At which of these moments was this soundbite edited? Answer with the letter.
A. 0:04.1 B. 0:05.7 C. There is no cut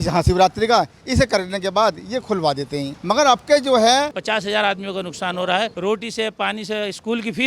A